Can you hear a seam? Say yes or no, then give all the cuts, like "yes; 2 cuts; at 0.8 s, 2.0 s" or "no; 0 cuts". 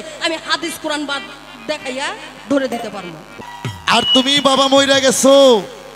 yes; 1 cut; at 3.4 s